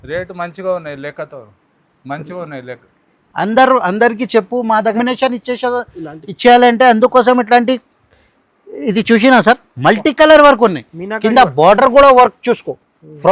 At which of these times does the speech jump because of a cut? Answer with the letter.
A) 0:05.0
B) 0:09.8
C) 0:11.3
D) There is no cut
A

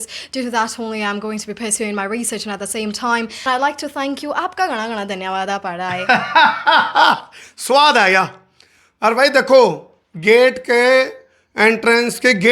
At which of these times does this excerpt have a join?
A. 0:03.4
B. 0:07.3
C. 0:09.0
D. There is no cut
A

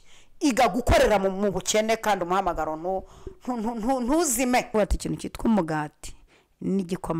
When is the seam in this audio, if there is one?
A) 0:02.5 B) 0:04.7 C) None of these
B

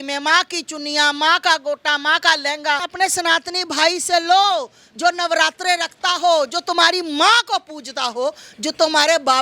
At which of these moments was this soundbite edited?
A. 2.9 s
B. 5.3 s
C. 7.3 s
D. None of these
A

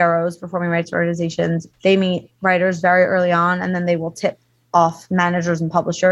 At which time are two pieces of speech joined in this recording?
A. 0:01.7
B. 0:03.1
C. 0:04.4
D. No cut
A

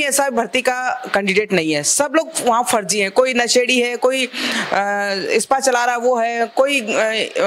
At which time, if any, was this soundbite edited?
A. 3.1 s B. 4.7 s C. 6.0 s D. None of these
D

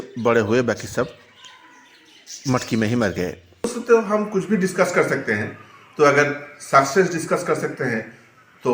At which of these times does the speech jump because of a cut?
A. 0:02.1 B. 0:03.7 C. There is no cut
B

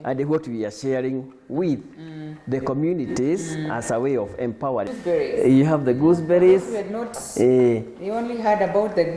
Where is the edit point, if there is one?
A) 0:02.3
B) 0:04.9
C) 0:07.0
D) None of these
B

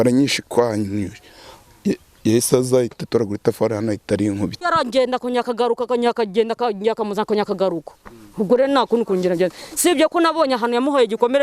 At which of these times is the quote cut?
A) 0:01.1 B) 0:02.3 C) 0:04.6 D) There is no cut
C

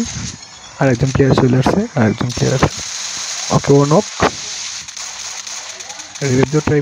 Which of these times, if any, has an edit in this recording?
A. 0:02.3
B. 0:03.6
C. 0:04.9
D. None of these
C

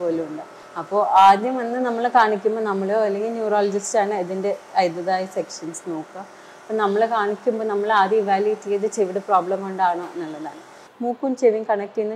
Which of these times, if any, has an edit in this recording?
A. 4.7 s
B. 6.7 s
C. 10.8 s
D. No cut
C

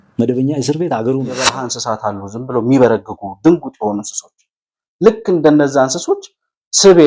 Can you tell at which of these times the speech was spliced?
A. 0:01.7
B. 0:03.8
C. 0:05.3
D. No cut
A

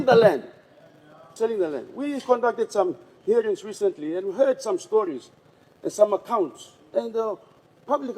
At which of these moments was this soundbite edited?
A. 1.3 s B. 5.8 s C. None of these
A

